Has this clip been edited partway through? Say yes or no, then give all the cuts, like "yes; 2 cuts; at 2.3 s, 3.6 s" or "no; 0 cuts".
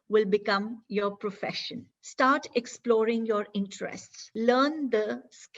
yes; 2 cuts; at 1.8 s, 4.2 s